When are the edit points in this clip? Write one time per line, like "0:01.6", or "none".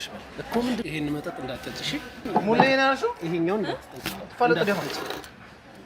0:02.3